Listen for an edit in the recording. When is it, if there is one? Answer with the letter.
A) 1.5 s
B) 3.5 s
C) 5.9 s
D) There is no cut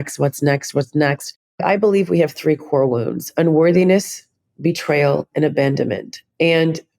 A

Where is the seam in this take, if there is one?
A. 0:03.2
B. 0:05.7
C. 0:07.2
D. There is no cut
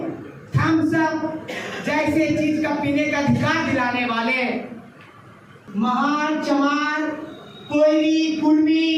B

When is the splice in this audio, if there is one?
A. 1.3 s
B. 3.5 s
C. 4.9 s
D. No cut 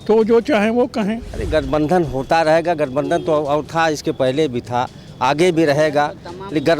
A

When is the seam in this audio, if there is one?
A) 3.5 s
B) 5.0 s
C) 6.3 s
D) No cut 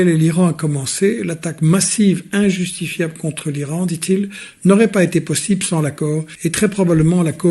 C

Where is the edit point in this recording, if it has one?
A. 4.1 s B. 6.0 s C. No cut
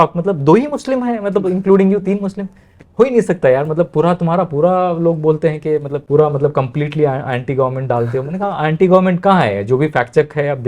B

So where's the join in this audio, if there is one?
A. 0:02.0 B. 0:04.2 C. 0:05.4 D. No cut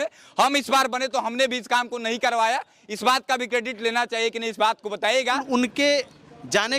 C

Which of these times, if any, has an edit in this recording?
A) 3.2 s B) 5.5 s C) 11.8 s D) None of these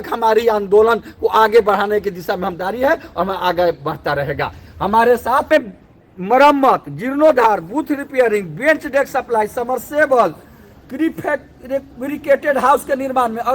B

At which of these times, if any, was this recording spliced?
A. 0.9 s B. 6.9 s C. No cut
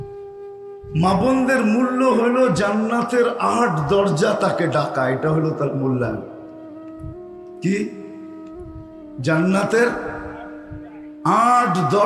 A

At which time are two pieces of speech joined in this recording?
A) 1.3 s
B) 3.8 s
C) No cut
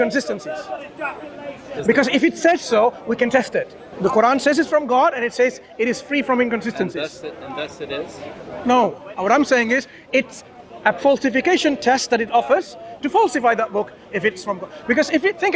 B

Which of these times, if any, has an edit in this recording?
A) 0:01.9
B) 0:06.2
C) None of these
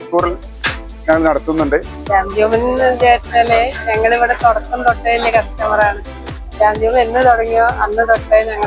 A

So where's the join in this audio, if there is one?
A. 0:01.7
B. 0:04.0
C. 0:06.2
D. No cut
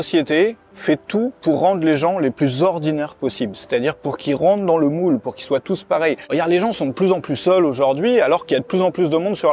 C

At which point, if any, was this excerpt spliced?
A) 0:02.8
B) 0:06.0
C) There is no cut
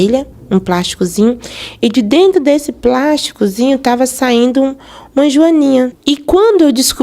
B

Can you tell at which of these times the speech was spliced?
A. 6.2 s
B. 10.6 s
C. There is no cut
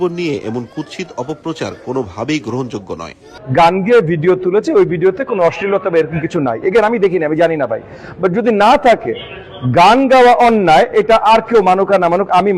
B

